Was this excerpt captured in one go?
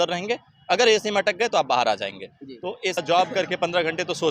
no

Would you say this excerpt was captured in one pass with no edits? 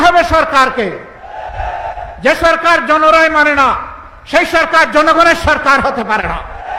yes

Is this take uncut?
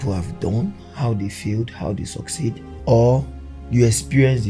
no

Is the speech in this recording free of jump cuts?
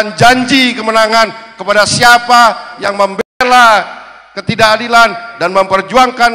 yes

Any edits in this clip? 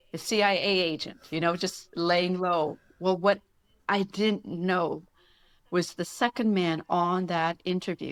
no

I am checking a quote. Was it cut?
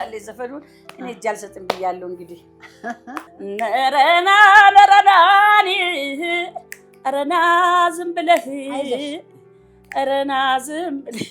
yes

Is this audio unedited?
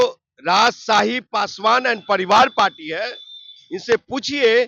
yes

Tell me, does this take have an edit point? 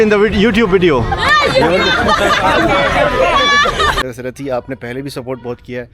yes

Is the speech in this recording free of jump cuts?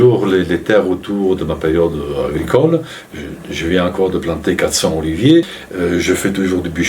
no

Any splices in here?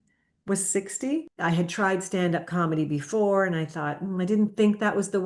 yes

